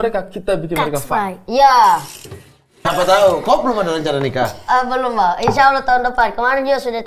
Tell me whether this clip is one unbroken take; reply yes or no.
no